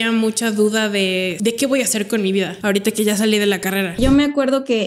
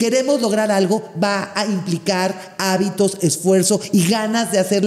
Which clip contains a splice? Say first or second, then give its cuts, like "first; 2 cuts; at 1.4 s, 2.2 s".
first; 3 cuts; at 1.3 s, 2.5 s, 4.0 s